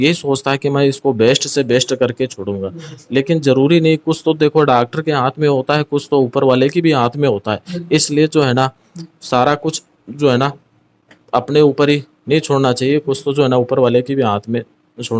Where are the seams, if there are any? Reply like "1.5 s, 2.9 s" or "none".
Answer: none